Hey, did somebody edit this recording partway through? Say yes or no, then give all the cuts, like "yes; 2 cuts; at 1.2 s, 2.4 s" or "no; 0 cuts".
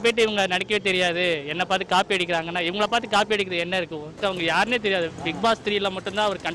yes; 1 cut; at 4.1 s